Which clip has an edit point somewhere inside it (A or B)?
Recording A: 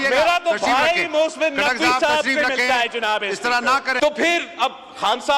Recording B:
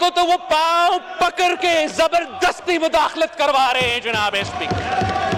A